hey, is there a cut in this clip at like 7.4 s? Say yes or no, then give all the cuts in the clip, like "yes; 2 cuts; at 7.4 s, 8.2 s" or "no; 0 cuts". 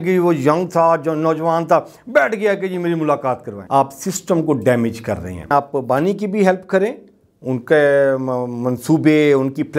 no; 2 cuts; at 3.6 s, 5.5 s